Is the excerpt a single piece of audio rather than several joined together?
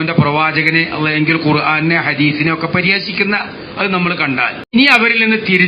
no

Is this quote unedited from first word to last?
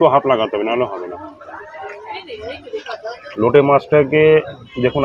no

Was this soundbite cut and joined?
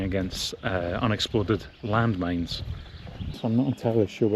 yes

